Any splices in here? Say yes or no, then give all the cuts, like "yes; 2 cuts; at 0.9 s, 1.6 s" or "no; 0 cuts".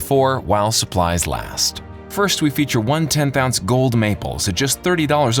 no; 0 cuts